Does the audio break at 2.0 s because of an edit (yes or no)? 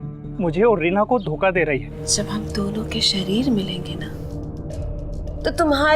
yes